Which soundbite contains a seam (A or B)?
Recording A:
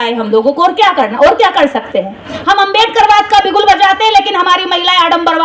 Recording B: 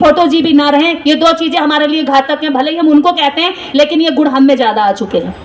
A